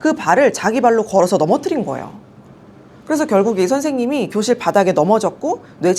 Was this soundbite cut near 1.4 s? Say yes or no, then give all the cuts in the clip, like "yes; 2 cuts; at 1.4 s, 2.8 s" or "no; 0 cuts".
no; 0 cuts